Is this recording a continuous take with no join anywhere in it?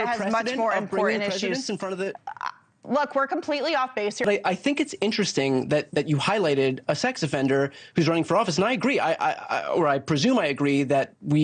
no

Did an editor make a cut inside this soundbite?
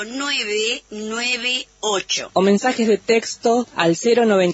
no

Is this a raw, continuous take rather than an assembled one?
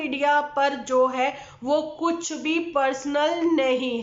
yes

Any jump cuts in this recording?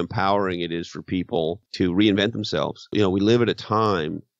yes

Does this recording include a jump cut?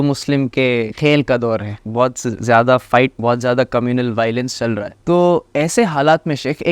yes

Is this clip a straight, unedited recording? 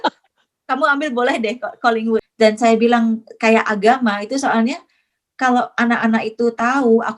no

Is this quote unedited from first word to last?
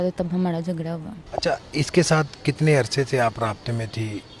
no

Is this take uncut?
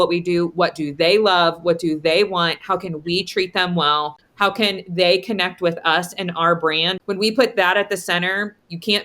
no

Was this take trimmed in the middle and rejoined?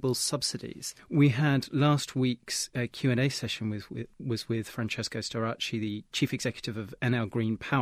no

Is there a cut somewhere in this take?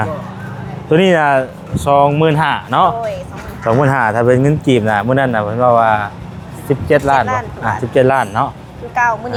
no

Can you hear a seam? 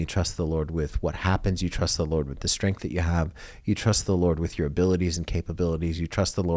no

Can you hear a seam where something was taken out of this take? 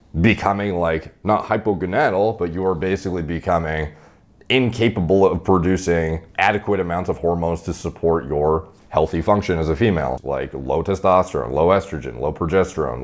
yes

